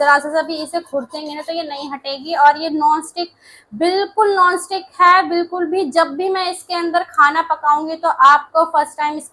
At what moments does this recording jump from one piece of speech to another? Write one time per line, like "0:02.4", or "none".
none